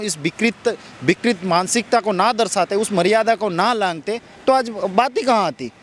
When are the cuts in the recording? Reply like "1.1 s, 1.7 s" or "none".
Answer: none